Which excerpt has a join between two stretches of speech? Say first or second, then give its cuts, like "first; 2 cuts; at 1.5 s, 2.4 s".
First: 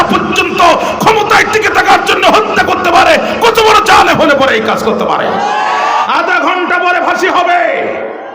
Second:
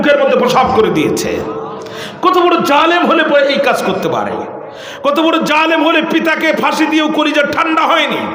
first; 1 cut; at 6.1 s